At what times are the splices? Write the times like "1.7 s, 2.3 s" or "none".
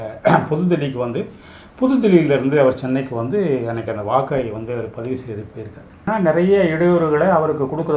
6.0 s